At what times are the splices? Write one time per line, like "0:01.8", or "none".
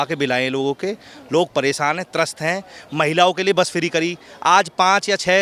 none